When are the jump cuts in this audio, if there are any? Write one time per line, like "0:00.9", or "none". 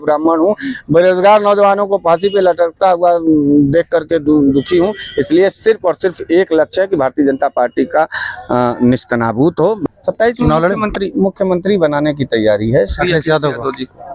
0:09.8